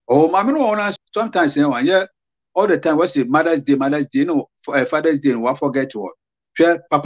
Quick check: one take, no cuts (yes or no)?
no